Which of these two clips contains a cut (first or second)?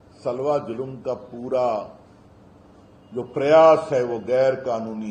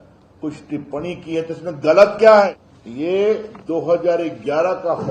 second